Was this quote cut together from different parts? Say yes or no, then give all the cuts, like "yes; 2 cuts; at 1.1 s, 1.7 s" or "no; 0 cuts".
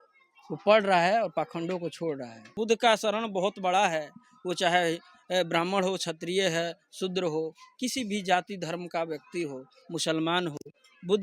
yes; 1 cut; at 2.5 s